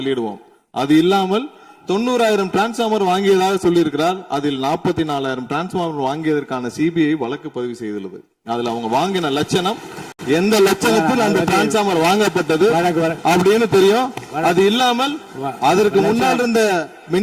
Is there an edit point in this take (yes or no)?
no